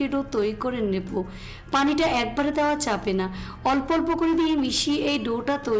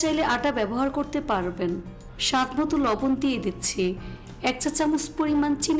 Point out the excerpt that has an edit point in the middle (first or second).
second